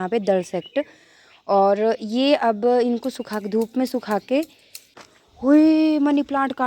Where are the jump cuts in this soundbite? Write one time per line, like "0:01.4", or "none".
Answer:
0:04.8

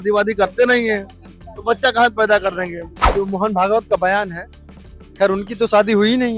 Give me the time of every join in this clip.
0:03.1

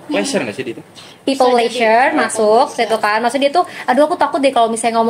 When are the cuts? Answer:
none

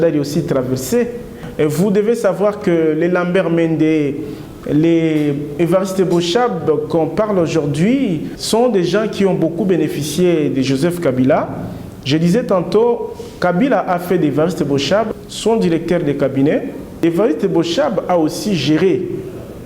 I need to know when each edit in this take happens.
0:01.4
0:08.3
0:15.1
0:17.0

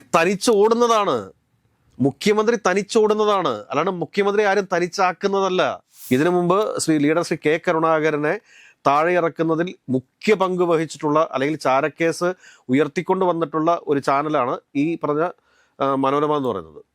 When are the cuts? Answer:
0:05.9

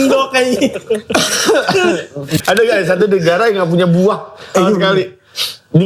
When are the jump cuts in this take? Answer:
0:02.4

